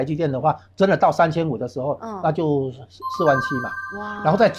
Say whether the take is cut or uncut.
uncut